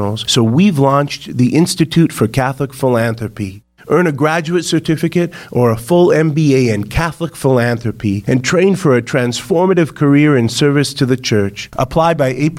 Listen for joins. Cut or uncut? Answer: uncut